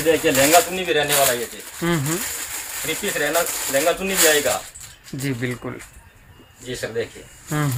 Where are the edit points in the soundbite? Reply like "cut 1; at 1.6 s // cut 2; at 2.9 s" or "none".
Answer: none